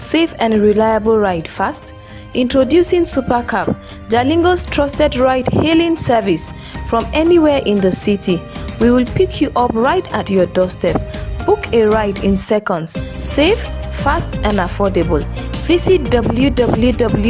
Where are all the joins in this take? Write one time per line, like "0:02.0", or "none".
none